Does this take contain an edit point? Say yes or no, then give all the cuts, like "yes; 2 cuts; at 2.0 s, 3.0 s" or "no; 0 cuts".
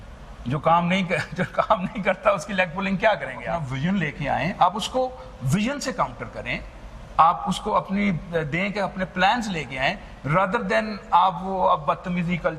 yes; 1 cut; at 3.7 s